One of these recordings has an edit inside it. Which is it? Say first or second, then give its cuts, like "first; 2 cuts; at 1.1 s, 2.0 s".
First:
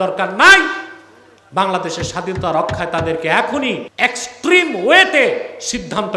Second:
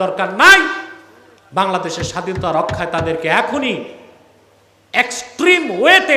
first; 1 cut; at 3.9 s